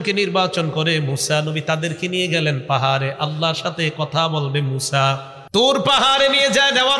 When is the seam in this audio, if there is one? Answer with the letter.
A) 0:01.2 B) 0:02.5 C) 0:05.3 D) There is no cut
C